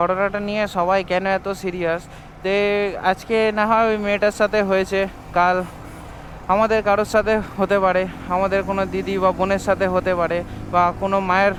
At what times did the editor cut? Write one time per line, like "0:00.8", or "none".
none